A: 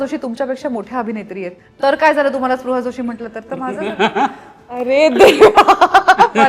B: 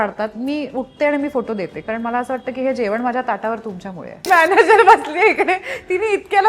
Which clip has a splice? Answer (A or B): B